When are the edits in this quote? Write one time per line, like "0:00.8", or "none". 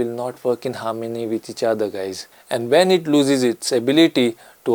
0:02.2